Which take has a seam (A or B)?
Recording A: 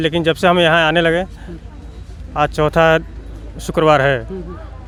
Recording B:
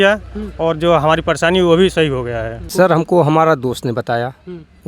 B